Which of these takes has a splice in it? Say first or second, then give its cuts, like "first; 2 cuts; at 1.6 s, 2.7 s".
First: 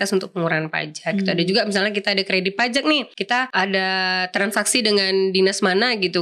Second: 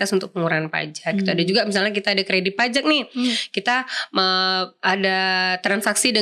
first; 1 cut; at 3.1 s